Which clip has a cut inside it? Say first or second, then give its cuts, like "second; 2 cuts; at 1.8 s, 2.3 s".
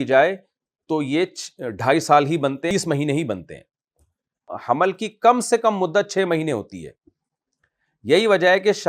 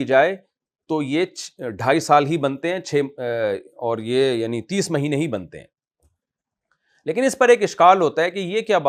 first; 2 cuts; at 2.7 s, 4.6 s